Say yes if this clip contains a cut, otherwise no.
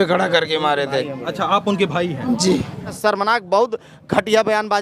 yes